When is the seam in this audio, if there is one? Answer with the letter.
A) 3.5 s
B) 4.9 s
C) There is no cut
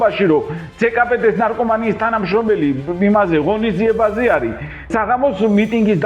B